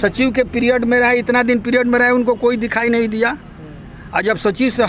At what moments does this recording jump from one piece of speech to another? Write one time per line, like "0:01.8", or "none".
none